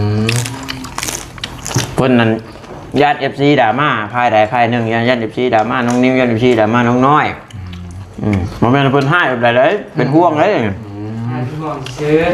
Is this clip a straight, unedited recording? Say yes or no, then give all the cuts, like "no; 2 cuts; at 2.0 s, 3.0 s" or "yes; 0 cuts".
yes; 0 cuts